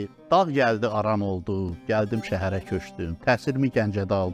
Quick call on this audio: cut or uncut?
uncut